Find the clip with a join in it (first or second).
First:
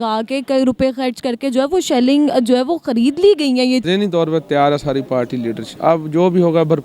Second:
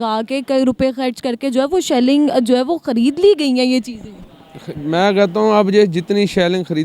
first